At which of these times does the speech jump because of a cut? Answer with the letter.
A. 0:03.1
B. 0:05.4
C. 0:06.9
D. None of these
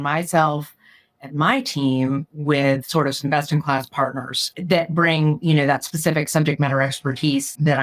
D